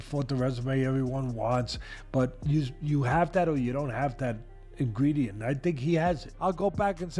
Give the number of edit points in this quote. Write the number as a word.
one